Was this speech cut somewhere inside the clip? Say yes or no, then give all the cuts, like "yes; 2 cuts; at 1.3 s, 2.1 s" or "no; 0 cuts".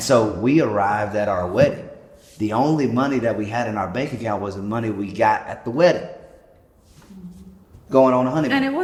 no; 0 cuts